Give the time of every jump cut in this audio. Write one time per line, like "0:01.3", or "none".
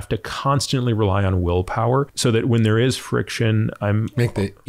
0:02.1